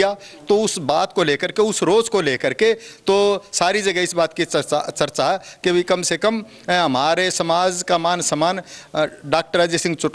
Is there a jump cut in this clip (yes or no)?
no